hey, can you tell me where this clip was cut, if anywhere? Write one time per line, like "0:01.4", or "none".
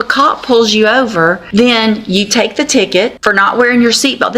0:01.4
0:03.2